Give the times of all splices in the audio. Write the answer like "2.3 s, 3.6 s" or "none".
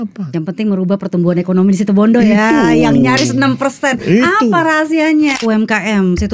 5.3 s